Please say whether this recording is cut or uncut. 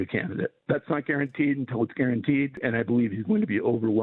cut